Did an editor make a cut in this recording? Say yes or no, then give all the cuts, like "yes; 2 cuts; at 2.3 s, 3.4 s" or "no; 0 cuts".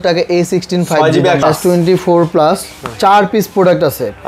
yes; 1 cut; at 1.4 s